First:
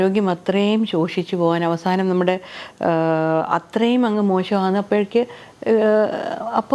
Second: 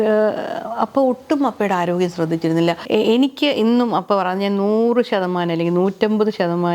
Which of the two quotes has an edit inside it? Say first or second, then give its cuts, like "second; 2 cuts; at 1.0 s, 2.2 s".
second; 1 cut; at 2.8 s